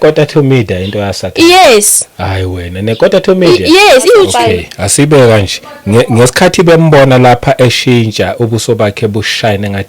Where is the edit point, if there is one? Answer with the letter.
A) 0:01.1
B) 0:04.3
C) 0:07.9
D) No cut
B